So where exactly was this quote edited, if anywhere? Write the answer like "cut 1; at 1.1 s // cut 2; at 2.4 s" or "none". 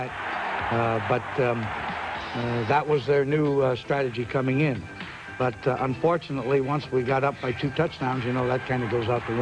none